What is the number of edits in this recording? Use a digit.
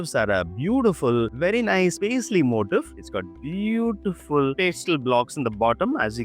1